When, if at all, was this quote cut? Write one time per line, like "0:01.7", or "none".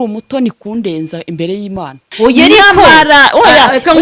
0:02.1